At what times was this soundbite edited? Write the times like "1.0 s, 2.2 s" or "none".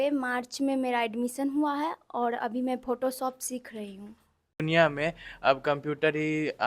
4.5 s